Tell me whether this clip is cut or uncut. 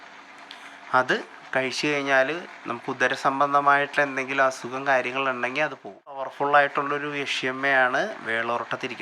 cut